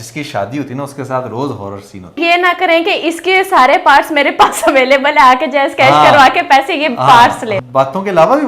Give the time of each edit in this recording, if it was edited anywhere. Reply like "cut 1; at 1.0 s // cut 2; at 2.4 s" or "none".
cut 1; at 2.2 s // cut 2; at 7.6 s